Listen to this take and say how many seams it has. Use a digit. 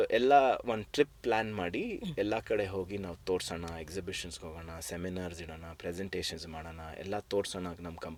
0